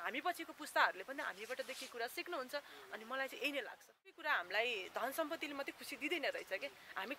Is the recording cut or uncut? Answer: cut